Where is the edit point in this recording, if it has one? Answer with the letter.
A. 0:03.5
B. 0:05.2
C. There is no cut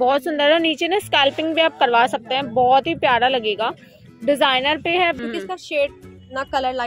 B